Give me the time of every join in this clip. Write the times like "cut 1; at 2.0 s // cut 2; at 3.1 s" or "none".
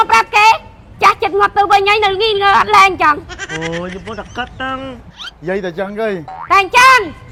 none